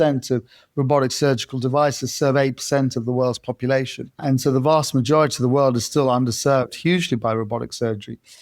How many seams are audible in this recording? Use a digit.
1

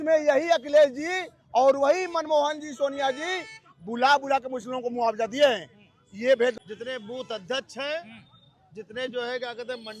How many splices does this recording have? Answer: 1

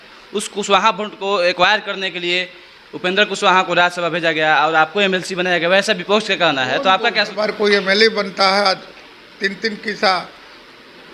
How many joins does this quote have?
1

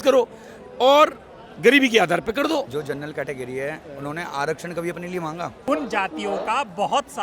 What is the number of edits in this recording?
2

